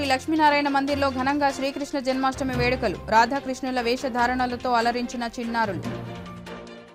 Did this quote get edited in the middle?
no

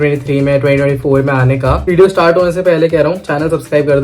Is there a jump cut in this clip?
yes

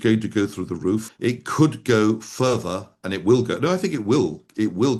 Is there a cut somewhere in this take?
no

